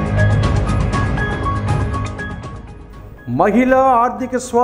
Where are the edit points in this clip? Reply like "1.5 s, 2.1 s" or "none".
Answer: 2.5 s